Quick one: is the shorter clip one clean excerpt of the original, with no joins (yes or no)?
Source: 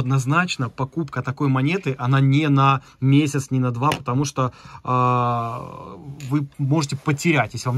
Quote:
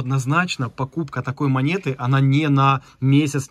yes